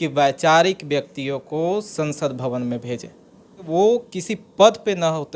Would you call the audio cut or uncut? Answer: cut